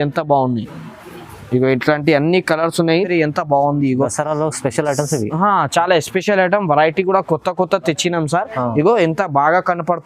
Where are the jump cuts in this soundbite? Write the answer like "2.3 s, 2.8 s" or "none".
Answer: 3.0 s